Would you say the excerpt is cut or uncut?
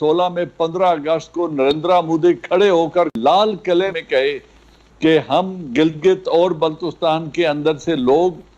cut